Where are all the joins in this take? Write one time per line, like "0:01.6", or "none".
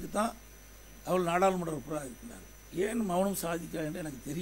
none